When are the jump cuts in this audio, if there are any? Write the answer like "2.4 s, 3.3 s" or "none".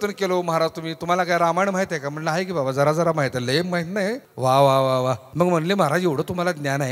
4.3 s, 5.2 s